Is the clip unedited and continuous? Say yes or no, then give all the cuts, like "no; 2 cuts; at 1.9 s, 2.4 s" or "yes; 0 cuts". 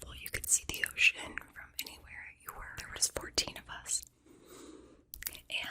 no; 1 cut; at 3.0 s